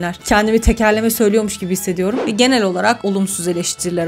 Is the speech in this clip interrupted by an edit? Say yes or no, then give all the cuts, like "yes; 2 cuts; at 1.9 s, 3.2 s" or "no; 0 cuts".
yes; 1 cut; at 2.2 s